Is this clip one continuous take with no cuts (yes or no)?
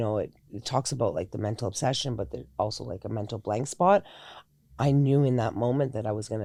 yes